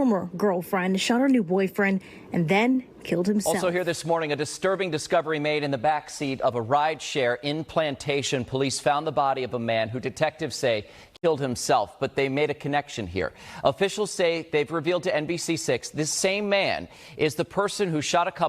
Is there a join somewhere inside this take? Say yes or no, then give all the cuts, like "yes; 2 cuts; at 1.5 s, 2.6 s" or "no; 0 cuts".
yes; 1 cut; at 3.5 s